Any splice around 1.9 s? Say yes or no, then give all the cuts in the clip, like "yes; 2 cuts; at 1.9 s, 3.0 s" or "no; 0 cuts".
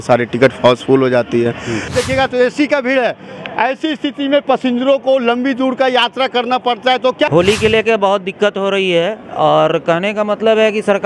yes; 2 cuts; at 1.9 s, 7.3 s